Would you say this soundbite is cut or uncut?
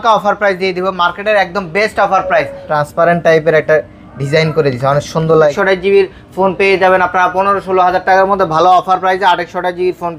cut